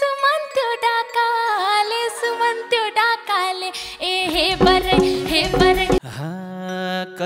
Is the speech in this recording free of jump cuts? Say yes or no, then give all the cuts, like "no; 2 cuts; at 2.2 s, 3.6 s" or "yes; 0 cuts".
no; 1 cut; at 6.0 s